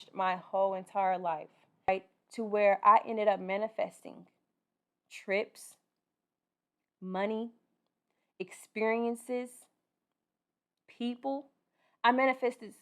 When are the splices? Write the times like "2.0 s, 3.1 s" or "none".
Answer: 1.9 s